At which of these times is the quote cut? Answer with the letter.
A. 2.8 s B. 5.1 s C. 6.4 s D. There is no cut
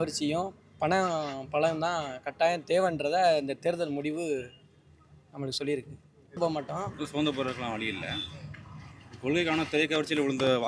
C